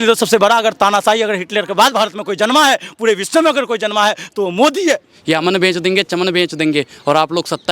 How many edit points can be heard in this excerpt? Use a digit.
1